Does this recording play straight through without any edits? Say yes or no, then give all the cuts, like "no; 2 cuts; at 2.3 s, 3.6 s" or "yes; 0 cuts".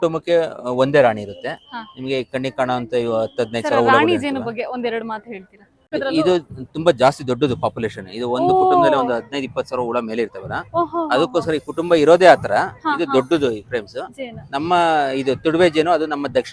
no; 1 cut; at 5.9 s